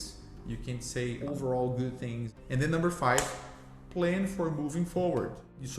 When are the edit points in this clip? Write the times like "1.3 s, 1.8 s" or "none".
1.2 s, 2.3 s